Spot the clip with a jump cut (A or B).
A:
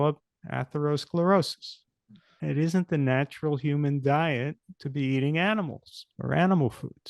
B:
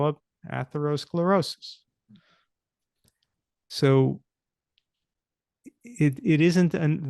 A